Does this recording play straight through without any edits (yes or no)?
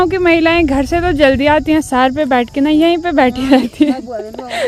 yes